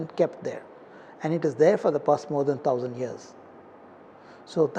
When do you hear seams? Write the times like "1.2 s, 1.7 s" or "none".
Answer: none